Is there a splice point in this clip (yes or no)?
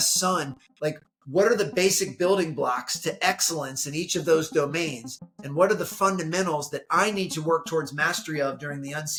no